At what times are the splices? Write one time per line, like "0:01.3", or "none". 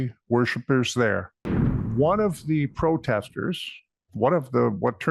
0:01.9